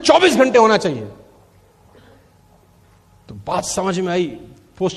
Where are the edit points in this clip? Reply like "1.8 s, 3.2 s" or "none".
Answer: none

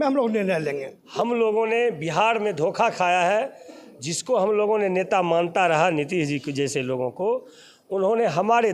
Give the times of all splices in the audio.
1.0 s

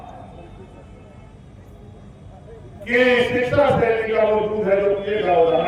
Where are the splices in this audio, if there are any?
none

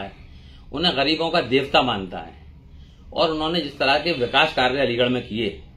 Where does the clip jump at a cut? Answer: none

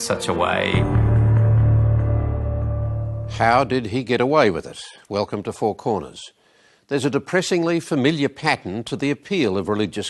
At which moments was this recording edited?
1.9 s

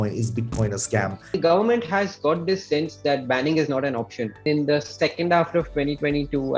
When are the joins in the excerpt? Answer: 1.3 s, 4.4 s

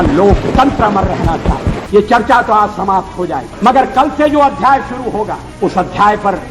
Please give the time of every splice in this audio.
1.8 s, 3.5 s, 5.4 s

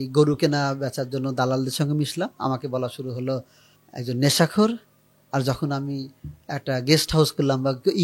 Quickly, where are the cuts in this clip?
none

